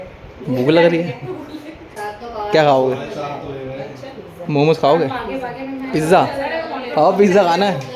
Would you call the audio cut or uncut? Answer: cut